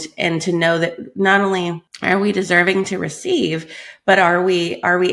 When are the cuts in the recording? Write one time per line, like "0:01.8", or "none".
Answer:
0:01.9